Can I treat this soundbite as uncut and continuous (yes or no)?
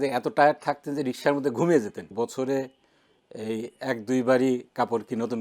no